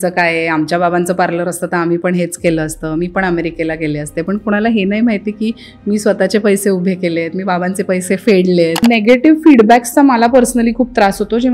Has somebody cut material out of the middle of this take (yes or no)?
yes